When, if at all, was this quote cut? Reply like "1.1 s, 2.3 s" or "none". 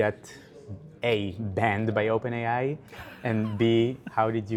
none